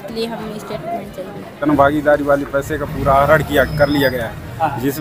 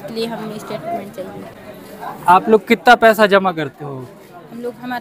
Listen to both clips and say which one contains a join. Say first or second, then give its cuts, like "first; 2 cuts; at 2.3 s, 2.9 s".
first; 1 cut; at 1.6 s